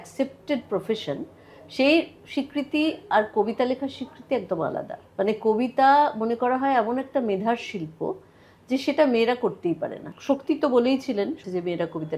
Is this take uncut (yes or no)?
no